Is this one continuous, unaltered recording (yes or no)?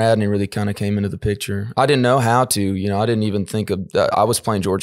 yes